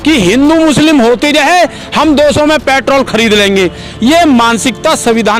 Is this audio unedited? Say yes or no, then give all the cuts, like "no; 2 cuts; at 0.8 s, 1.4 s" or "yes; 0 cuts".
yes; 0 cuts